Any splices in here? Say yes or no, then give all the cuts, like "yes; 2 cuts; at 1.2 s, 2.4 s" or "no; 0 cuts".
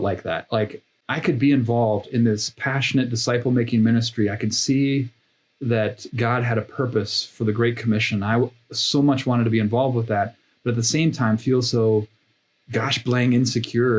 yes; 1 cut; at 0.9 s